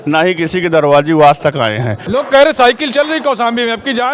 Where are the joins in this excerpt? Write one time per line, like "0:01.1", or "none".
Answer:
0:02.2